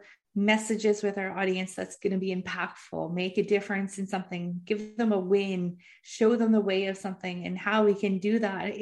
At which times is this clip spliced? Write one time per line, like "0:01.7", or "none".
none